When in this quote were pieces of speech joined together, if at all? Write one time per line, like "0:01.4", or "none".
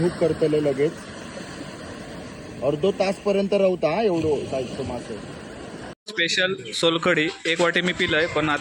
0:06.0